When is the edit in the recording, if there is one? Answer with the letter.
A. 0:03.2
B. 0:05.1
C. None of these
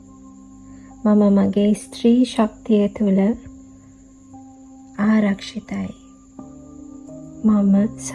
C